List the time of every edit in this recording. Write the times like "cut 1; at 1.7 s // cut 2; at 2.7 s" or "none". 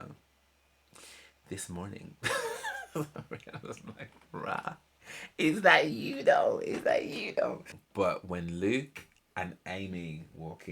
cut 1; at 7.8 s